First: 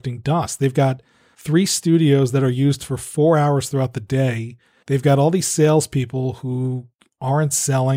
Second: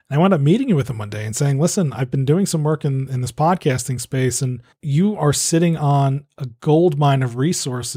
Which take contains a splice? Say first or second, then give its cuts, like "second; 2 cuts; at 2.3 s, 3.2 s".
second; 1 cut; at 4.8 s